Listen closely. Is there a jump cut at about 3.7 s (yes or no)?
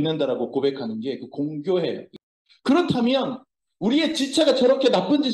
no